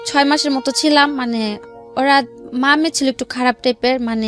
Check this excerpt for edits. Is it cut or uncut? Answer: uncut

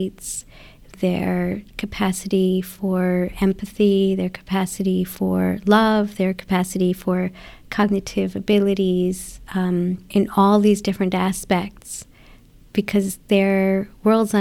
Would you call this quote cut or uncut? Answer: cut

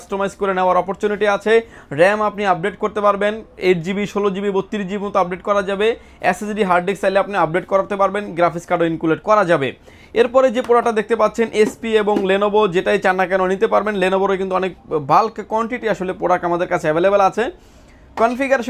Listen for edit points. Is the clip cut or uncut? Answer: uncut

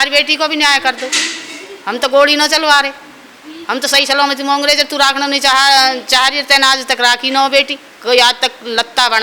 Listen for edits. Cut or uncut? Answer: uncut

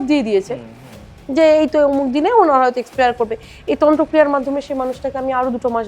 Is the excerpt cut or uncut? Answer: uncut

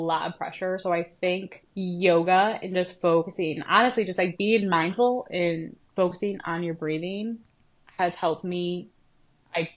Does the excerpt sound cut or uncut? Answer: cut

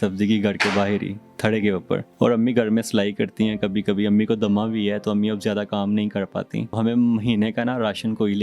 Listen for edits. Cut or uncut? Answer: cut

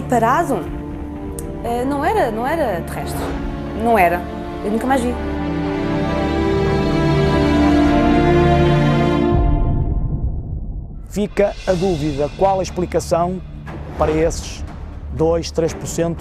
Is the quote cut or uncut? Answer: cut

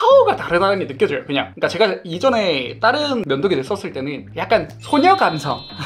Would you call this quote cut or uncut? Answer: uncut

